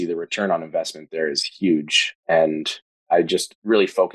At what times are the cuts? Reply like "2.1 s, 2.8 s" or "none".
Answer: none